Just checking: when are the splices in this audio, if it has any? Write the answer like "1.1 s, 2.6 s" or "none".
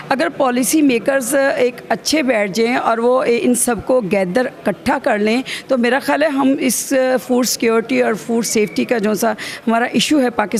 none